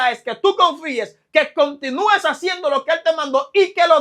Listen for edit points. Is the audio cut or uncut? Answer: uncut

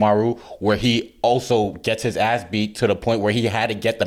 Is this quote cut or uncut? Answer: uncut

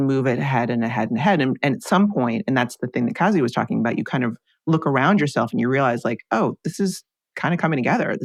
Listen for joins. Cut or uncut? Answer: uncut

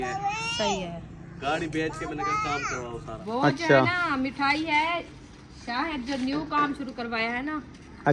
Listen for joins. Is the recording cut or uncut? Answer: cut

